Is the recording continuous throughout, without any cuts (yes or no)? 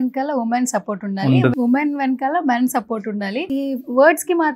no